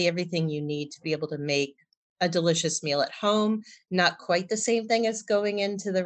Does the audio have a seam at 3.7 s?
no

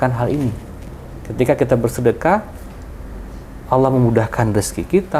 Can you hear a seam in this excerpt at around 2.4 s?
no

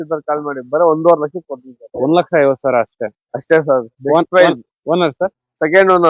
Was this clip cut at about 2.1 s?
no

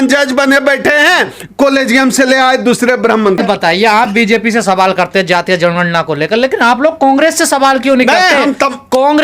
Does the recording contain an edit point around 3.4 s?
yes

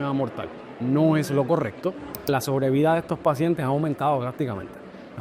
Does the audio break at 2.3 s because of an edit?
yes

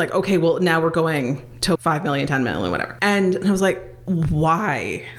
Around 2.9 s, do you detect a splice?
yes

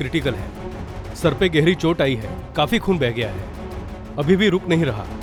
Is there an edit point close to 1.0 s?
no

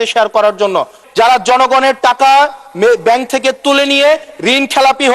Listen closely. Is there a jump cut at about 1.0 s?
yes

